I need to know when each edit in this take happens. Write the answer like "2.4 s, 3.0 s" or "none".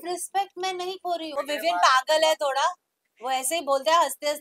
1.3 s